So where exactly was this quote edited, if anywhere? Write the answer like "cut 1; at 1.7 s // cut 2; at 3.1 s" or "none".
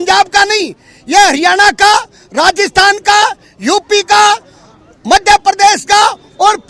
none